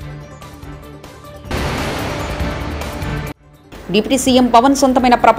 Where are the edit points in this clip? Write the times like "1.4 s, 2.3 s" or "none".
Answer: 1.0 s